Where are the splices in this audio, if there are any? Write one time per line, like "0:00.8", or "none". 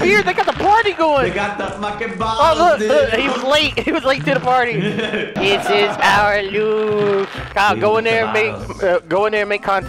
0:05.3
0:07.4